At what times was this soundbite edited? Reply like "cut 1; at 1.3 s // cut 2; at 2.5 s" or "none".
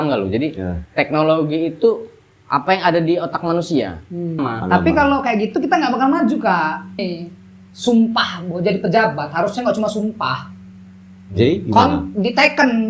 cut 1; at 4.4 s // cut 2; at 7.1 s